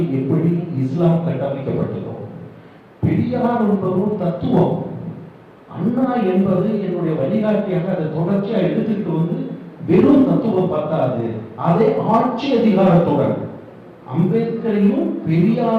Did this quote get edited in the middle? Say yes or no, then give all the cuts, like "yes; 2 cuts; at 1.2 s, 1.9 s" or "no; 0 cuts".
no; 0 cuts